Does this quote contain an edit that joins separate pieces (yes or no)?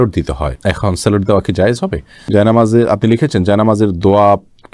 yes